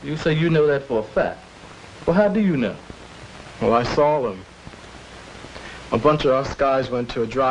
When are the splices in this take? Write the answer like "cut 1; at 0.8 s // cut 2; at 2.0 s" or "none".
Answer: none